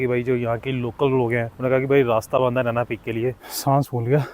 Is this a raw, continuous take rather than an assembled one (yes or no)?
no